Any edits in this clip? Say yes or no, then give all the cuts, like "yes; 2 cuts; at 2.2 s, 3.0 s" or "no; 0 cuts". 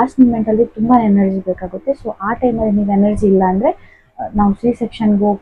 no; 0 cuts